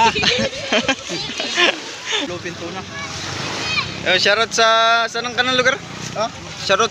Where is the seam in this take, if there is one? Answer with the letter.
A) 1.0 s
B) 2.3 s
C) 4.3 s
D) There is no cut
B